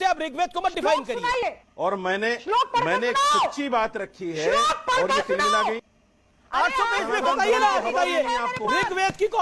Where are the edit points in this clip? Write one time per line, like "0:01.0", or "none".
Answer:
0:01.7
0:05.8